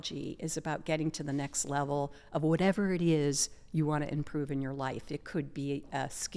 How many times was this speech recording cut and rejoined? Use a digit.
0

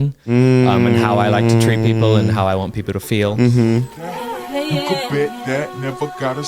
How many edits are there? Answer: 1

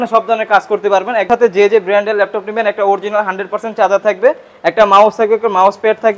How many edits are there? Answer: 1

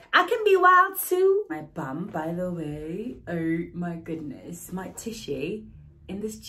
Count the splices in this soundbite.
1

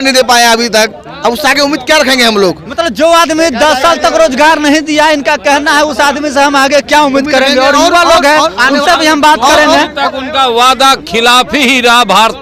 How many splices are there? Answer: 0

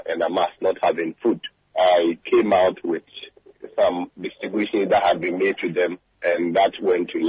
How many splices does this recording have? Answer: 2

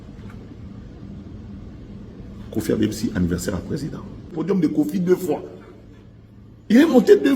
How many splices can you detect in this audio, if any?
1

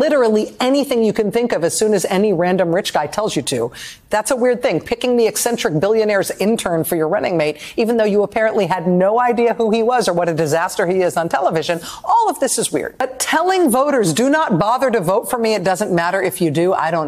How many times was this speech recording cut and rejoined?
1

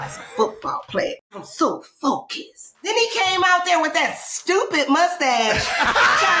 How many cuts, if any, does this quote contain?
2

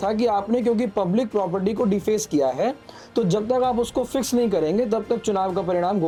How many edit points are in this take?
0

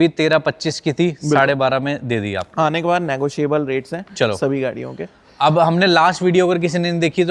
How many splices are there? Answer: 0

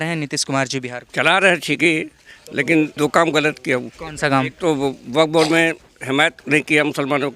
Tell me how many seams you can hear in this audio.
4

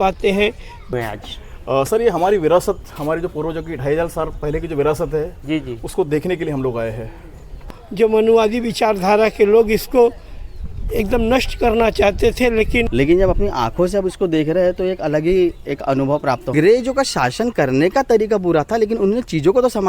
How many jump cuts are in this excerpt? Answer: 4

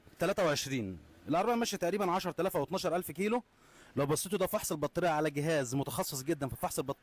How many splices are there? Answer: 0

